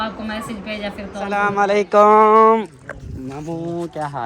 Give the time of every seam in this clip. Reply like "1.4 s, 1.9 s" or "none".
1.4 s